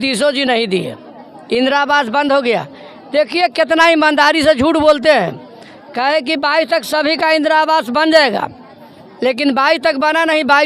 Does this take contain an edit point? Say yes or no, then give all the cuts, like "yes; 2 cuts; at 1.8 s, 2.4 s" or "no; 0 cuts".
no; 0 cuts